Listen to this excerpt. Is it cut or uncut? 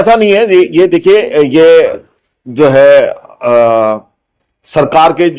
uncut